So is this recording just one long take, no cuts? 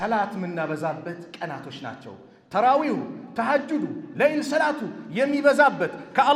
yes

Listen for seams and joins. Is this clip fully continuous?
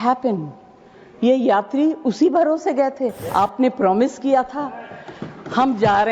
no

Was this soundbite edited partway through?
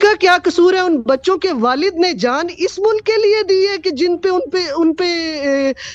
no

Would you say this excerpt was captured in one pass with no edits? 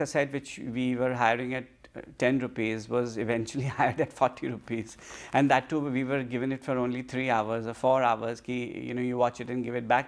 yes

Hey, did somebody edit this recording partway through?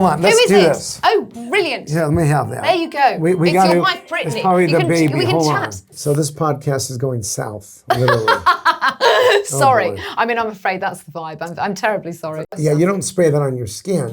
yes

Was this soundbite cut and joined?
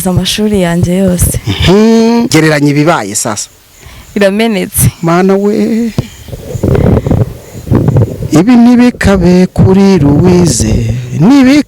yes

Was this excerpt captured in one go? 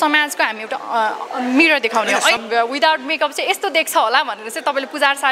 no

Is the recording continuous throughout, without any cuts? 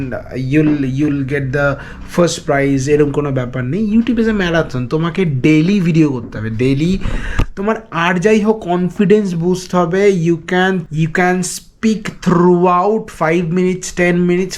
yes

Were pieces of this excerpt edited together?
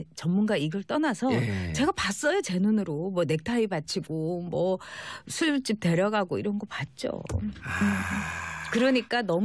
no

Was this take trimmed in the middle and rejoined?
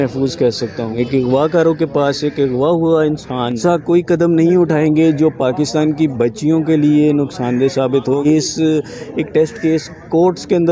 yes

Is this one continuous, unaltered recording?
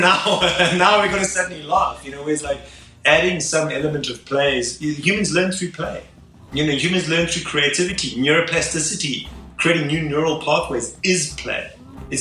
yes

